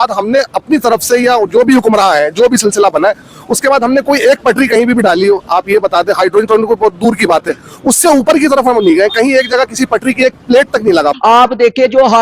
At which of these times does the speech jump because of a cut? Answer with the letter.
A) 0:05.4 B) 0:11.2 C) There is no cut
B